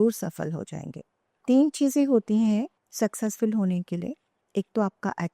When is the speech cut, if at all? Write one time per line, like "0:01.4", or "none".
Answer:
0:01.4
0:02.8